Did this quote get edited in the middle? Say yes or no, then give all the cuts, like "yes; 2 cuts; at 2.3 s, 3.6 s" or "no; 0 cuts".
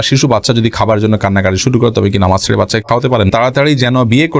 yes; 1 cut; at 3.3 s